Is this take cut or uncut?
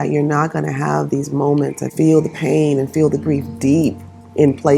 cut